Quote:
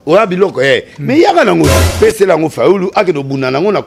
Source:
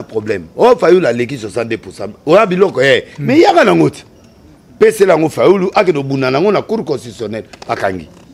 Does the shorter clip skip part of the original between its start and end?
yes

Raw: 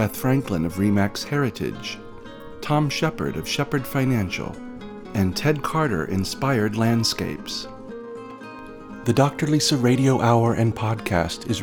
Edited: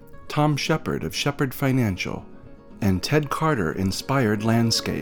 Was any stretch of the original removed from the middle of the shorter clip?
no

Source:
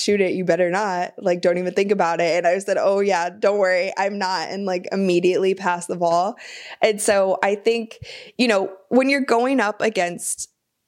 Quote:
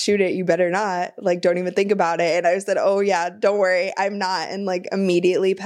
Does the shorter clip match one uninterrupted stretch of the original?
yes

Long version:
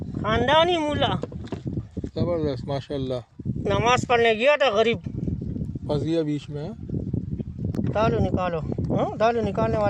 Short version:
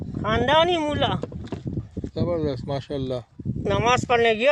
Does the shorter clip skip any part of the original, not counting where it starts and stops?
no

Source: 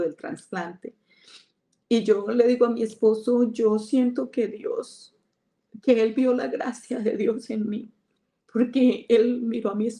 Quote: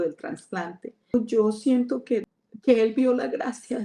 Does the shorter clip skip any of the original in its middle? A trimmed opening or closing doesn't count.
yes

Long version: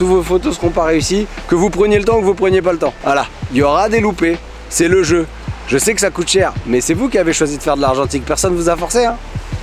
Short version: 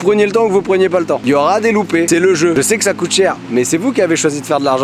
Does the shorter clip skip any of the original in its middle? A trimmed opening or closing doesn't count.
yes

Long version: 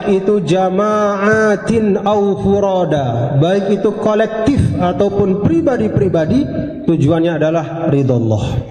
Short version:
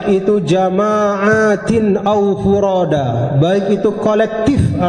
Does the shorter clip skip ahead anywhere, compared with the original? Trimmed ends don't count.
no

